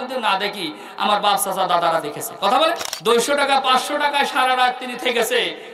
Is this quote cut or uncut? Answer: cut